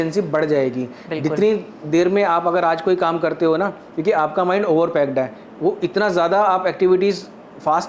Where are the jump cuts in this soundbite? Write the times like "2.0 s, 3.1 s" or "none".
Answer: none